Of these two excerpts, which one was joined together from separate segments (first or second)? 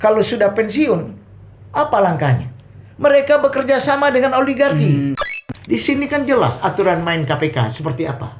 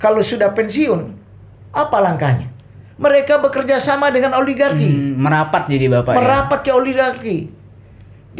first